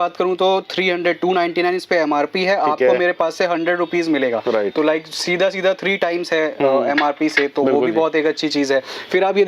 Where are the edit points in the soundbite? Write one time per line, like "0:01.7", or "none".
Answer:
none